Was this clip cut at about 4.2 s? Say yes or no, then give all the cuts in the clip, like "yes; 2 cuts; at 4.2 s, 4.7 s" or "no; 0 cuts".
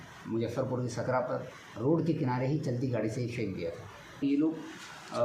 yes; 1 cut; at 4.2 s